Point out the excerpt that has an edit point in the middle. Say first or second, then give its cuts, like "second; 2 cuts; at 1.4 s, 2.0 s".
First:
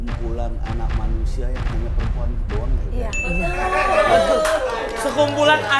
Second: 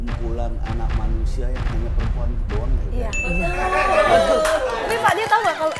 second; 1 cut; at 4.9 s